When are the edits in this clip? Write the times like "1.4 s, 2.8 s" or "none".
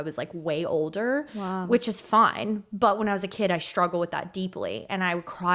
none